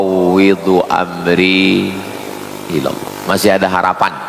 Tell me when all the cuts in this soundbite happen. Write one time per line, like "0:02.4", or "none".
0:03.0